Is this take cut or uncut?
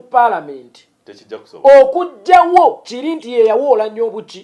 uncut